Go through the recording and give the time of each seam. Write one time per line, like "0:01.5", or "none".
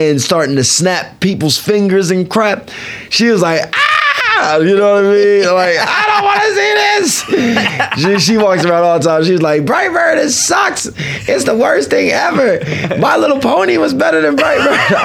none